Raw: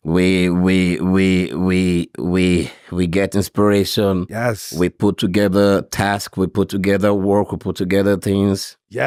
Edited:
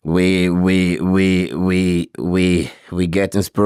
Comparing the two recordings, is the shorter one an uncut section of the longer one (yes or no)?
yes